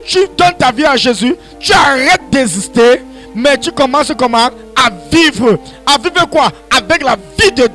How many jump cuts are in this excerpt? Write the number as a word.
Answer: zero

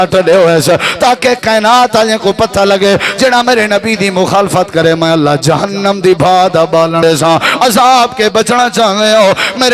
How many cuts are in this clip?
one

